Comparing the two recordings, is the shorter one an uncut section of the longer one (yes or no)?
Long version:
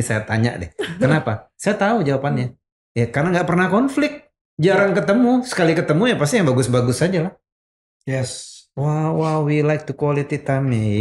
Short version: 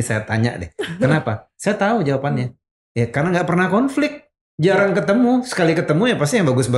yes